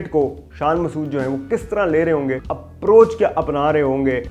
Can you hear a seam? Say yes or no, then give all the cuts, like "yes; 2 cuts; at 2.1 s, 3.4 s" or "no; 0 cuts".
yes; 1 cut; at 2.4 s